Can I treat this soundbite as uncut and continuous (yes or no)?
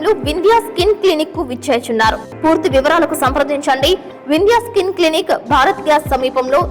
no